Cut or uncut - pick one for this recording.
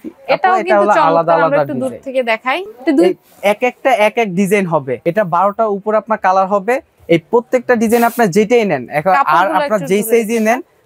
cut